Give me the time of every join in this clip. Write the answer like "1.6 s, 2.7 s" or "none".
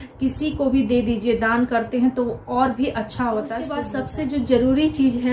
3.8 s